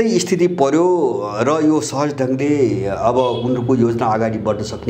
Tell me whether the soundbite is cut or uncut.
uncut